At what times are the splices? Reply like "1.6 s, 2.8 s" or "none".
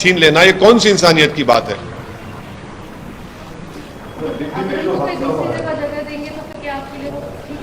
none